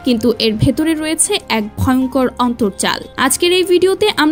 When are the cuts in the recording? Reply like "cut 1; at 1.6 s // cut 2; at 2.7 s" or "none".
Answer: none